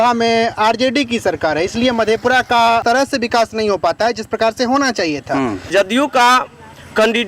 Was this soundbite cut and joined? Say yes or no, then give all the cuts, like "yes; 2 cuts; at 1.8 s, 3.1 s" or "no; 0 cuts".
yes; 2 cuts; at 2.8 s, 5.7 s